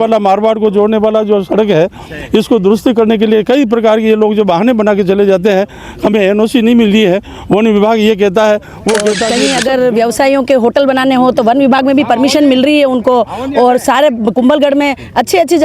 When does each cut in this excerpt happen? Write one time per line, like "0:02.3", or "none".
0:09.3